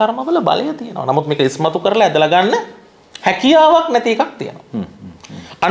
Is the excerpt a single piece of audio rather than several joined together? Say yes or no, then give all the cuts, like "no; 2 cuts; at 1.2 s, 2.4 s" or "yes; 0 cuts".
yes; 0 cuts